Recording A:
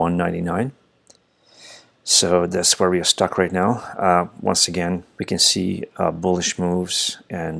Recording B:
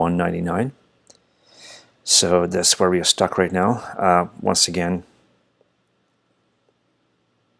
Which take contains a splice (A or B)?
A